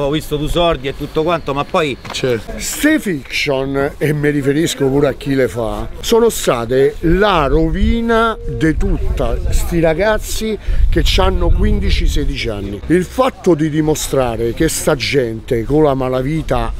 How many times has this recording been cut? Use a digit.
3